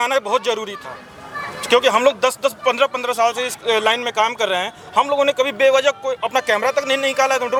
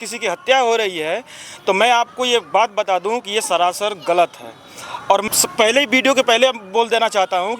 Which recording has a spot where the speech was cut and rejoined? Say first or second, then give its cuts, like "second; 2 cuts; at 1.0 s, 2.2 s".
second; 1 cut; at 5.2 s